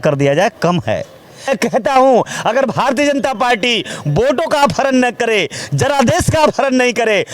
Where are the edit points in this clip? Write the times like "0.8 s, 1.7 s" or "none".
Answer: 1.5 s